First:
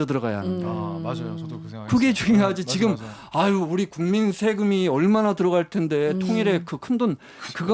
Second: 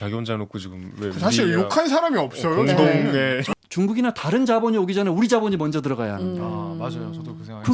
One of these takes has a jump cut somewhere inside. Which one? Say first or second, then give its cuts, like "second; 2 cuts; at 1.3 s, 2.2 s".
second; 1 cut; at 3.4 s